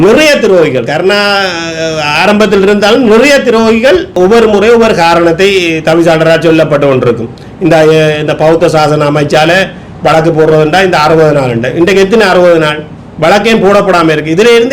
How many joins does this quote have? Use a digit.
1